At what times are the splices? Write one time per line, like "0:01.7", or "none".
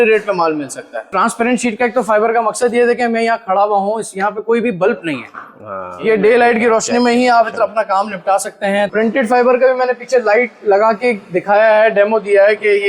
0:01.1
0:06.0
0:08.9